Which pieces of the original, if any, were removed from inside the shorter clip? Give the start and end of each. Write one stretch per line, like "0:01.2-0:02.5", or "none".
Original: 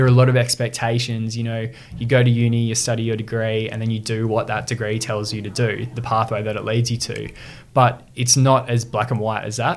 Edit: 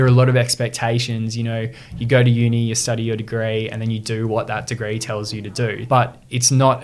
0:05.8-0:07.6